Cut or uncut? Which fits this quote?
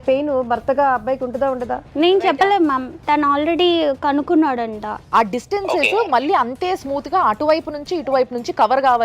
cut